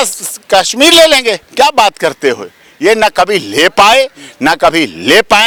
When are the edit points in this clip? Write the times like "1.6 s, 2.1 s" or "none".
none